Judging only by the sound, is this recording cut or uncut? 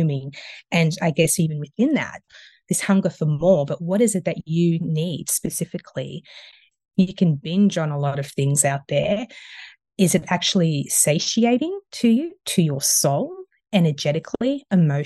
cut